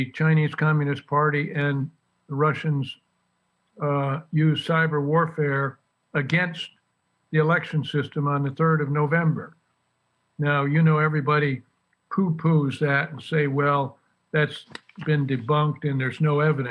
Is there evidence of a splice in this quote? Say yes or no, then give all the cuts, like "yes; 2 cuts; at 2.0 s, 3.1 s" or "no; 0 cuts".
no; 0 cuts